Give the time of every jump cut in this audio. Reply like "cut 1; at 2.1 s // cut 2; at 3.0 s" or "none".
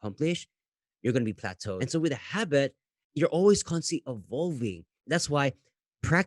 cut 1; at 1.8 s